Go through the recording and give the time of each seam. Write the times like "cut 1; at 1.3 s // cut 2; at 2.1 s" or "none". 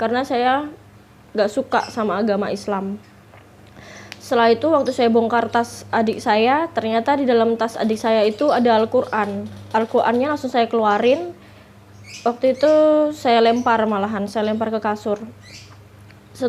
none